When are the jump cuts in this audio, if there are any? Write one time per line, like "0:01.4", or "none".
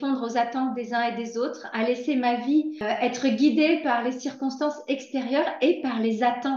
0:02.8